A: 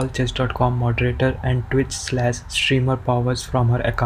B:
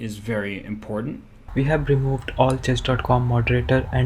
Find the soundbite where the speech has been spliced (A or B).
B